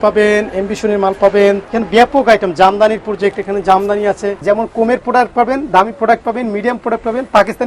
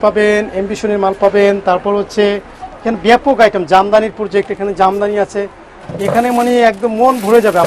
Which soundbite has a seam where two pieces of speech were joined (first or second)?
first